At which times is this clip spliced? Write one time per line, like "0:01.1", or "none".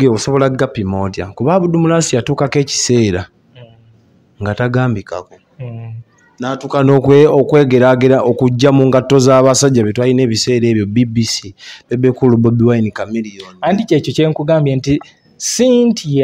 none